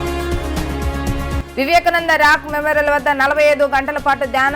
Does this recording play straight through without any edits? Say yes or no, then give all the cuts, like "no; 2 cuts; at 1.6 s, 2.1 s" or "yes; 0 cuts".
no; 1 cut; at 1.4 s